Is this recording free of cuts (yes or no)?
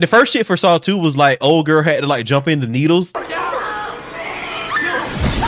yes